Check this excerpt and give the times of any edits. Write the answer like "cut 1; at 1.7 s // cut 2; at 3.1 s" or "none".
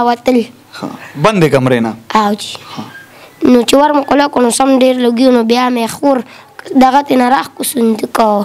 none

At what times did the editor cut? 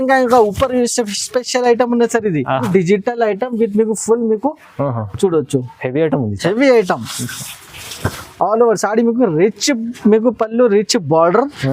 cut 1; at 2.7 s

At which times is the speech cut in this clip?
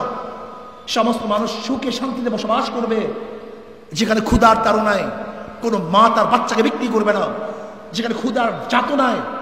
none

